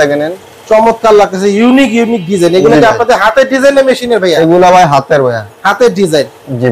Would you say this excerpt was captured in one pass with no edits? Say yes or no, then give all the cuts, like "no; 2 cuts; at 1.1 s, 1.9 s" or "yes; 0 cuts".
yes; 0 cuts